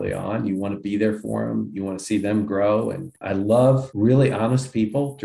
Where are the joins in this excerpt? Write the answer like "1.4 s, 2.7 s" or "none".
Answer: 3.1 s, 3.9 s